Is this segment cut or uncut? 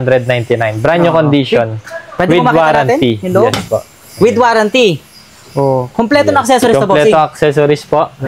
uncut